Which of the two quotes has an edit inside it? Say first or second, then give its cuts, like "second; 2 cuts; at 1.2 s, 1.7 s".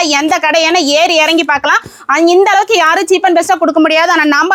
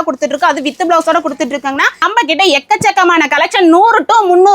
second; 1 cut; at 2.1 s